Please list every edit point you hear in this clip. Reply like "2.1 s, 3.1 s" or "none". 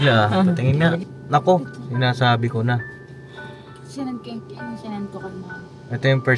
1.1 s